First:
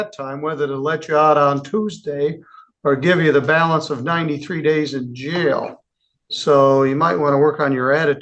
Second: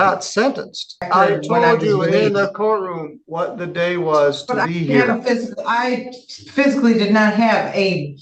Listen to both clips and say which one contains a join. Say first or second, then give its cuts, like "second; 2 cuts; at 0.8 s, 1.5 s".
second; 1 cut; at 1.1 s